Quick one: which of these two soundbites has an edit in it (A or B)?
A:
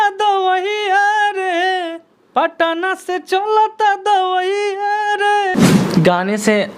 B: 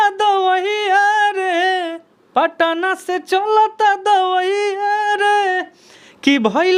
A